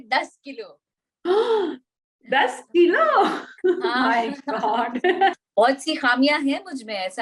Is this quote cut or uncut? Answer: cut